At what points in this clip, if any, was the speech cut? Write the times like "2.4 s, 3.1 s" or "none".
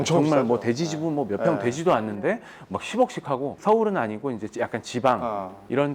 3.6 s

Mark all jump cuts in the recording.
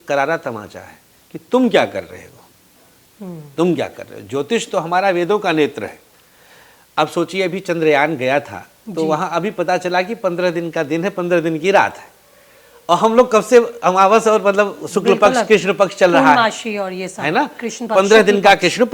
none

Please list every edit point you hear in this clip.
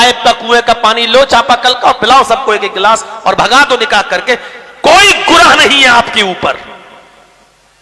none

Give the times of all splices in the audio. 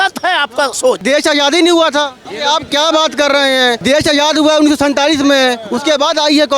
1.0 s, 2.2 s, 3.8 s

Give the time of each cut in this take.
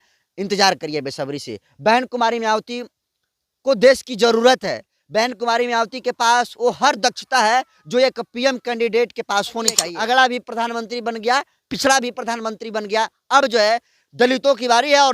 9.8 s

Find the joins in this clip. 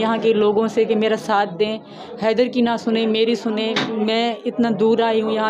none

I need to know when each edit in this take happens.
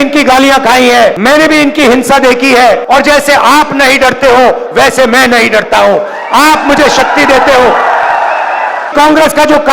1.2 s, 2.8 s, 8.9 s

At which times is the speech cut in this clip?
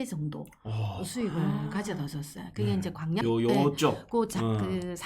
3.2 s

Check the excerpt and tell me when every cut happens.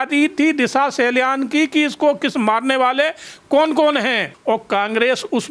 4.3 s

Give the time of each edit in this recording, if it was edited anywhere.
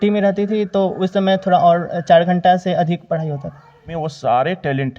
3.9 s

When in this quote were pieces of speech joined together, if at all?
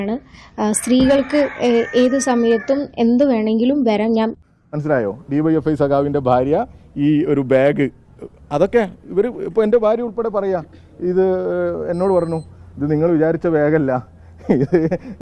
4.4 s

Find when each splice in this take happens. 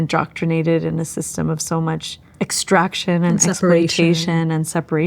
2.2 s

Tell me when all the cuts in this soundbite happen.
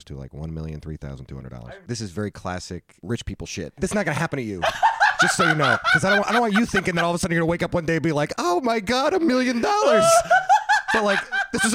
1.6 s, 2.9 s, 3.8 s

